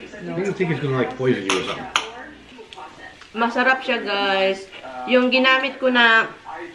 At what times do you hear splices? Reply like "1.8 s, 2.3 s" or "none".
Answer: 2.6 s